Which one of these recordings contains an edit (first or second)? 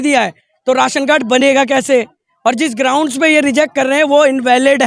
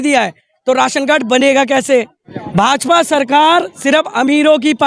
second